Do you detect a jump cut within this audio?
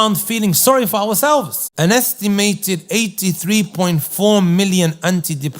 yes; 1 cut; at 1.6 s

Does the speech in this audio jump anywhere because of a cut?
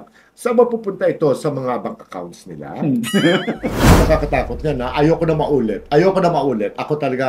yes; 1 cut; at 4.0 s

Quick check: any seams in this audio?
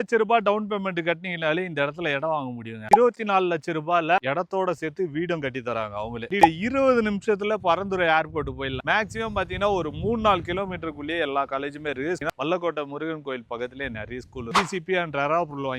yes; 5 cuts; at 2.9 s, 6.4 s, 8.8 s, 12.2 s, 14.5 s

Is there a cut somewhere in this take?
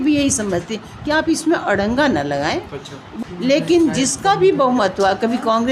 yes; 1 cut; at 3.0 s

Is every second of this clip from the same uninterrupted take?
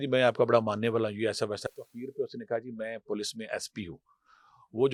yes; 0 cuts

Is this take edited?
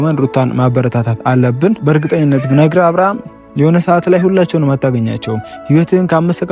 yes; 1 cut; at 1.8 s

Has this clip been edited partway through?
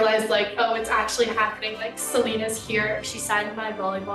yes; 1 cut; at 3.0 s

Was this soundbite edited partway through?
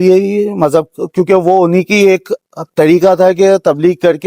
no; 0 cuts

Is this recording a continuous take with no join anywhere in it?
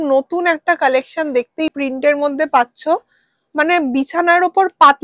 no; 1 cut; at 1.7 s

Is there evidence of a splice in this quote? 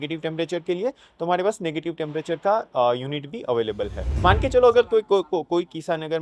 yes; 1 cut; at 4.2 s

